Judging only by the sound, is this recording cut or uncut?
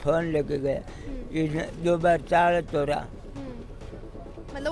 uncut